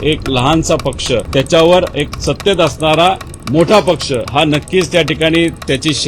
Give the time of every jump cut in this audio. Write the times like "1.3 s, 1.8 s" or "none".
1.3 s, 2.1 s, 4.3 s

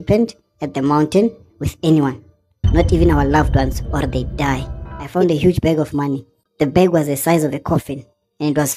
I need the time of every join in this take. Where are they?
5.1 s

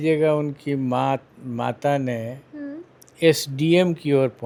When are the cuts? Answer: none

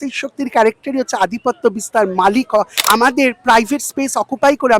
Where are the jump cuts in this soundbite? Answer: 2.8 s

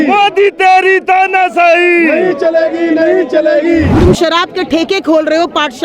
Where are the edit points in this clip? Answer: 3.9 s

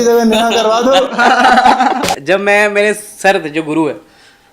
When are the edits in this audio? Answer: 2.2 s

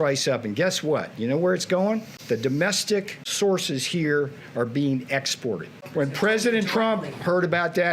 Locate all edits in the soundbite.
2.1 s, 3.2 s

